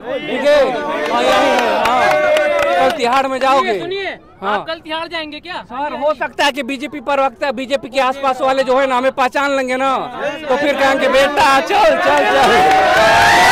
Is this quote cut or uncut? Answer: uncut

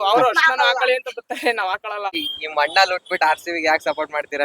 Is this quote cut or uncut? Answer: cut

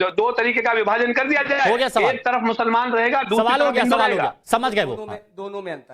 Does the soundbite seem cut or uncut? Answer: cut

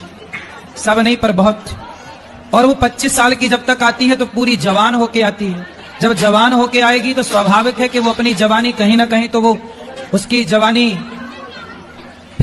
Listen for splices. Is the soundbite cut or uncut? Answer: uncut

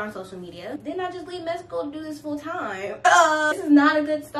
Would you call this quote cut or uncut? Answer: cut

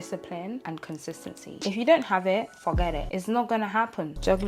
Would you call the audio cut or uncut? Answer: cut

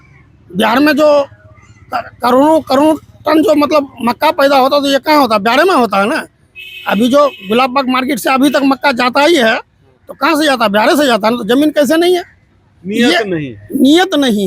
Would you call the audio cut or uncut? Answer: uncut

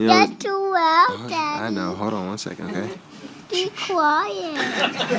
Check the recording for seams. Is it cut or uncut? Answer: uncut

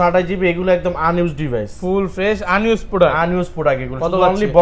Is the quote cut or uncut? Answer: uncut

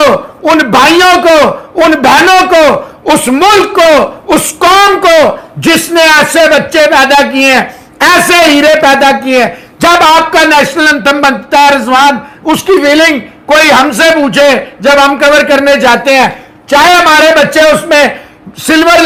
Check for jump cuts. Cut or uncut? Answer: uncut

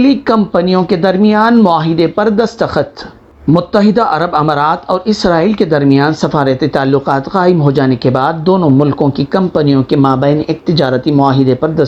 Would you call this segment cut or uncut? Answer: uncut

